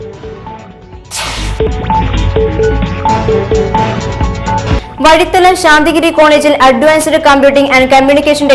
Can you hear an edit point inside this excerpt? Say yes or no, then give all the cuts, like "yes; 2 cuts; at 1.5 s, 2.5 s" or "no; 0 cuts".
yes; 1 cut; at 1.7 s